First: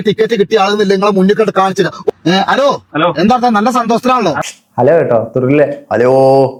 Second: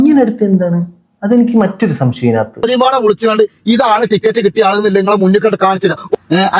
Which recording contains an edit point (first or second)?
second